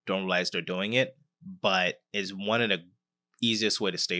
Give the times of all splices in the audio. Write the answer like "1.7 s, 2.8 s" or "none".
none